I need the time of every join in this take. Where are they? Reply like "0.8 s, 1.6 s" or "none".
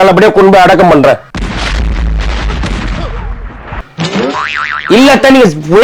1.2 s